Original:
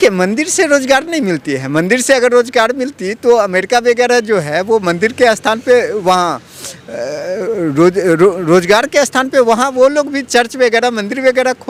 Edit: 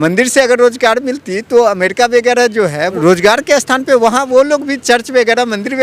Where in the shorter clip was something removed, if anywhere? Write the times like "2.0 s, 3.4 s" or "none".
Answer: 2.9 s